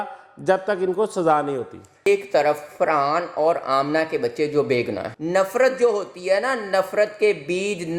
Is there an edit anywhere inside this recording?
yes; 2 cuts; at 2.0 s, 5.1 s

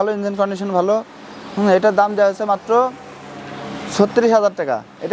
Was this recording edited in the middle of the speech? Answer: no; 0 cuts

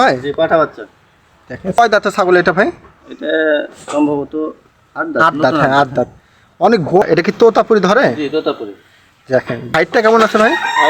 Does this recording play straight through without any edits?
no; 3 cuts; at 1.8 s, 7.0 s, 9.7 s

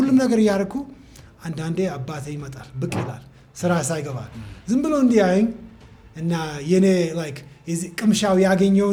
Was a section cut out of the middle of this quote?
no; 0 cuts

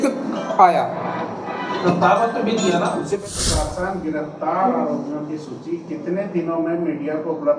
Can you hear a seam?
yes; 1 cut; at 3.2 s

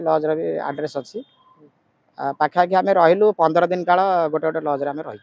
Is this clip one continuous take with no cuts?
yes; 0 cuts

